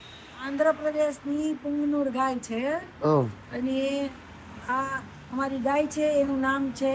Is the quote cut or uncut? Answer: uncut